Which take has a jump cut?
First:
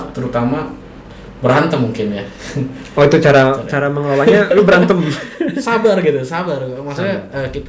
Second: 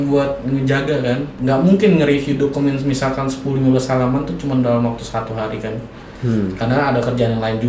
second; 1 cut; at 1.3 s

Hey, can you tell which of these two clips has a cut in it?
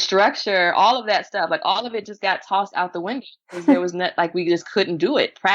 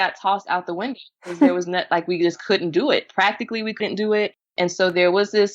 second; 1 cut; at 4.5 s

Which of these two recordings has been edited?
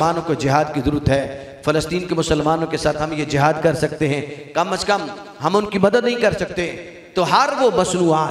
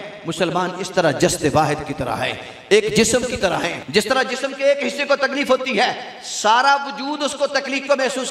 second; 1 cut; at 3.8 s

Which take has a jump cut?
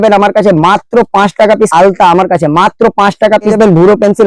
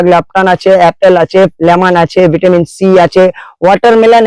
first; 2 cuts; at 1.7 s, 3.5 s

